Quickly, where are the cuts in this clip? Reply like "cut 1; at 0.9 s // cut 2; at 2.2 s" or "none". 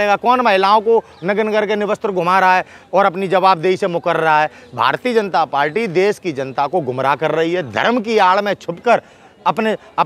none